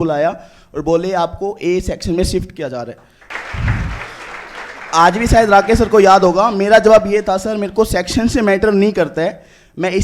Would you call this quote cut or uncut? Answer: cut